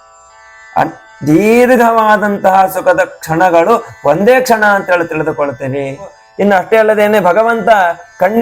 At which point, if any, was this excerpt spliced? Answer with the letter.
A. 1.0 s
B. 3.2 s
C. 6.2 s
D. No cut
C